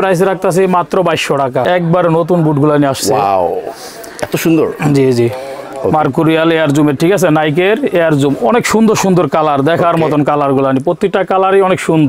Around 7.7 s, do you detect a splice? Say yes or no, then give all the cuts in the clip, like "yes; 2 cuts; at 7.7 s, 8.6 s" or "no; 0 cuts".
no; 1 cut; at 1.7 s